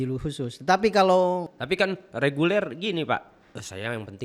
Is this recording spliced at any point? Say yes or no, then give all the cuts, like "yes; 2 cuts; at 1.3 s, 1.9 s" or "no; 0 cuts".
no; 0 cuts